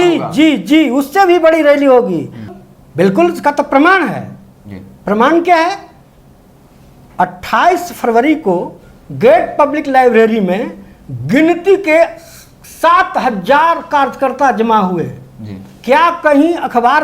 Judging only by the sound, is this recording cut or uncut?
cut